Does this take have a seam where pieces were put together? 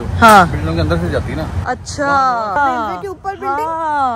yes; 1 cut; at 2.6 s

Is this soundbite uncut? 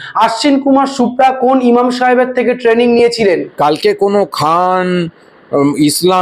no; 1 cut; at 3.5 s

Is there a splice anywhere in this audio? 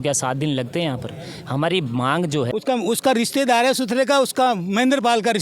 yes; 1 cut; at 2.4 s

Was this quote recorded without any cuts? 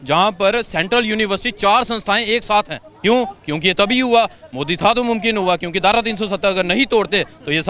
no; 1 cut; at 2.8 s

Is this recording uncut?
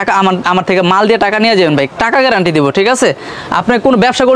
yes; 0 cuts

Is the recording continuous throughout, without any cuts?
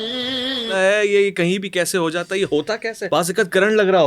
no; 2 cuts; at 0.7 s, 3.0 s

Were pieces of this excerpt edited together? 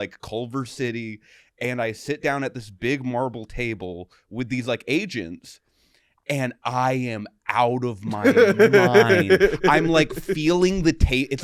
no; 0 cuts

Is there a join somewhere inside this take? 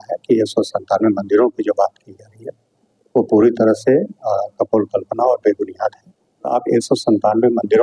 yes; 1 cut; at 6.5 s

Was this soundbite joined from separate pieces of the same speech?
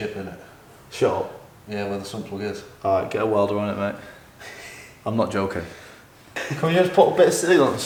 no; 0 cuts

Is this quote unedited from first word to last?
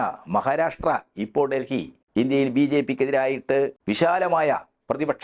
no; 2 cuts; at 2.0 s, 3.8 s

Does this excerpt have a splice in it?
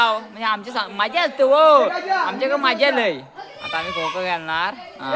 no; 0 cuts

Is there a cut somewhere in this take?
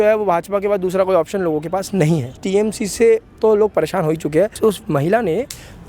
yes; 2 cuts; at 2.4 s, 4.5 s

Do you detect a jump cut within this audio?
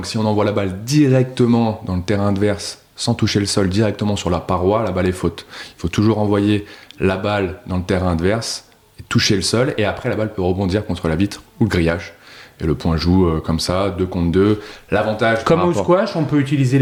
no; 0 cuts

